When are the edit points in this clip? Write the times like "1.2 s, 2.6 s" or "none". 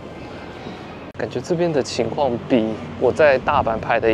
1.0 s